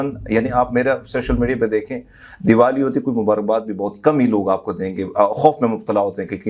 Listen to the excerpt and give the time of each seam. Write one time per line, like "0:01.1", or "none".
none